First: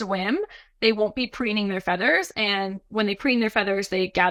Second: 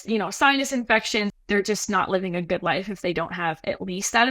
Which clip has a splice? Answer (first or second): second